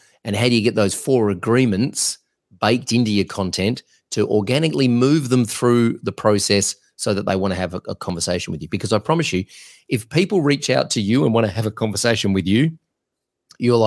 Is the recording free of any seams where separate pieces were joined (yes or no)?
yes